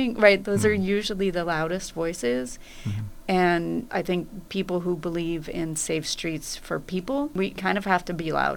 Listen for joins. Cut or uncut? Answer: cut